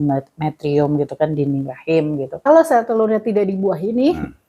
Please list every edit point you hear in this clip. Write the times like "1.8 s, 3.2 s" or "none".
2.5 s